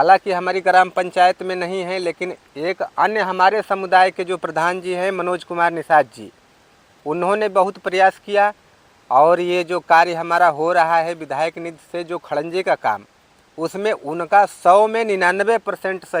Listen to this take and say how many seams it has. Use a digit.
0